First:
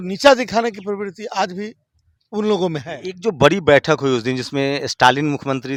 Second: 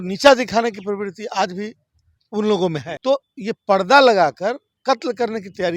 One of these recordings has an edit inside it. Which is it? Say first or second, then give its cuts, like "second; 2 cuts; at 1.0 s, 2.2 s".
second; 2 cuts; at 2.9 s, 4.7 s